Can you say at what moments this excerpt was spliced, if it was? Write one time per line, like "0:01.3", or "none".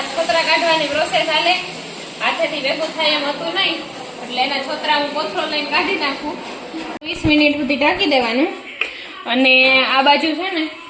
0:07.0